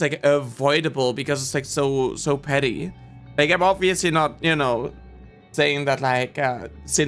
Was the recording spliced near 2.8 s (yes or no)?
no